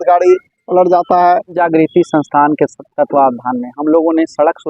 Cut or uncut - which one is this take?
cut